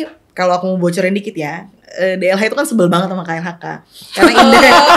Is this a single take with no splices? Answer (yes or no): yes